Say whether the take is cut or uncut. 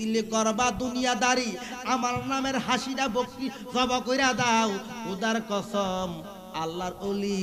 uncut